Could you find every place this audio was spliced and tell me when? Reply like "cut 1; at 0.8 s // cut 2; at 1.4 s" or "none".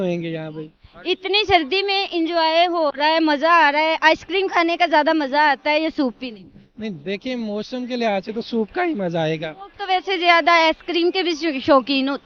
none